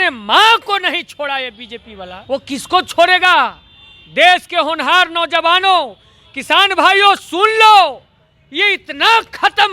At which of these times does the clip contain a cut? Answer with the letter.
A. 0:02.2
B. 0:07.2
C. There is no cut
A